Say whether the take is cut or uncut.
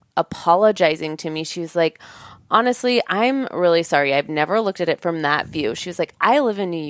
uncut